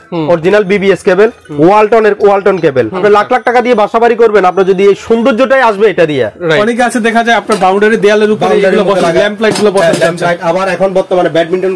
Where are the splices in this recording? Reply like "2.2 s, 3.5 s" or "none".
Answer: 2.9 s, 6.6 s